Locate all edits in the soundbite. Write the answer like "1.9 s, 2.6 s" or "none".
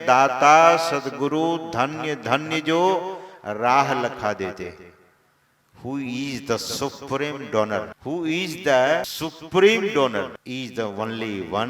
7.9 s, 9.1 s, 10.4 s